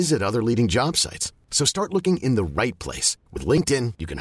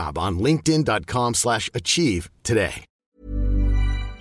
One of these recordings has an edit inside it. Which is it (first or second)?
second